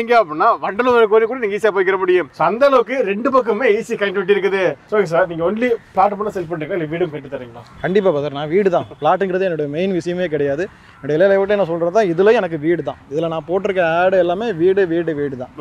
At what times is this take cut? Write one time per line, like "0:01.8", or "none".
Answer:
0:04.8